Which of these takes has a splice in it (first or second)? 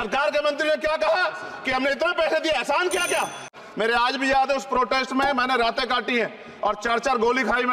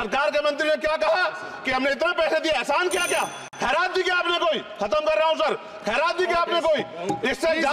first